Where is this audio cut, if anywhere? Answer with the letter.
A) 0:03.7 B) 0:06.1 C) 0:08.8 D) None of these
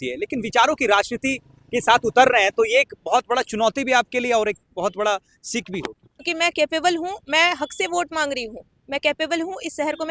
B